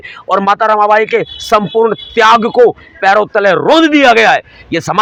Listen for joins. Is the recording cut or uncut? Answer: uncut